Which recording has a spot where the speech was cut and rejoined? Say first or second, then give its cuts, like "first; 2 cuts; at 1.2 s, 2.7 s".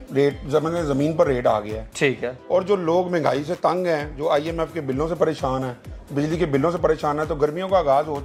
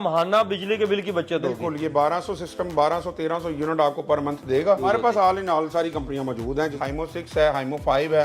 second; 2 cuts; at 4.8 s, 6.7 s